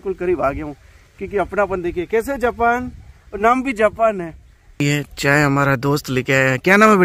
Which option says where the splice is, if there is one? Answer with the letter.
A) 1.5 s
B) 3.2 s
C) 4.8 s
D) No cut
C